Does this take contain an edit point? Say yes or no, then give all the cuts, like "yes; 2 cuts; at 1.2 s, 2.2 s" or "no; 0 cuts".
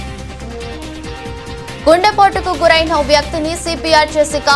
yes; 1 cut; at 1.2 s